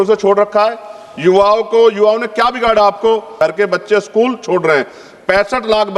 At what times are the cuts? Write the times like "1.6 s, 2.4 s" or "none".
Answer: 3.3 s